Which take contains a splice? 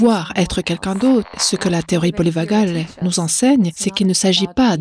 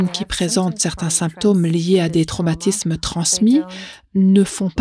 first; 3 cuts; at 1.4 s, 2.9 s, 3.8 s

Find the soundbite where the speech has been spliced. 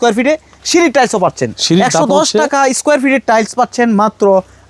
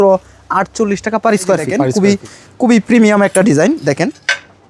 second; 1 cut; at 1.8 s

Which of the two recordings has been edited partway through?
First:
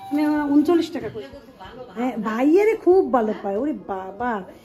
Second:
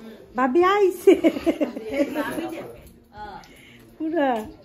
first; 1 cut; at 1.0 s

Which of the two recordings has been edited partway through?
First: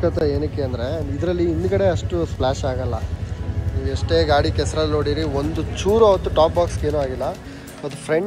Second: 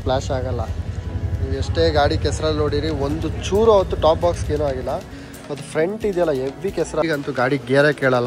second; 1 cut; at 7.0 s

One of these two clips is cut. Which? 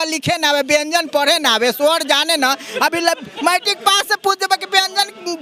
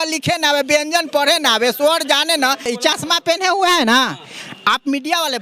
second; 1 cut; at 2.7 s

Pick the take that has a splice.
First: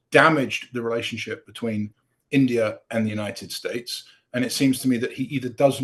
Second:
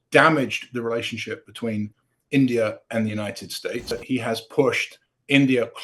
second; 1 cut; at 4.0 s

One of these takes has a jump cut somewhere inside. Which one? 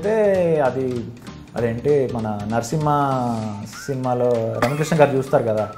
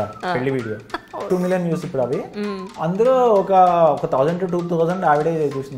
second; 1 cut; at 1.3 s

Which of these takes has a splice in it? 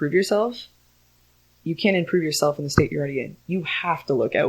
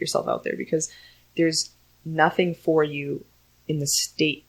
first; 1 cut; at 3.5 s

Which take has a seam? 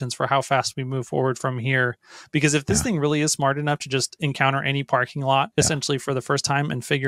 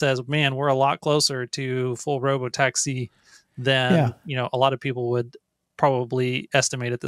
first; 1 cut; at 5.5 s

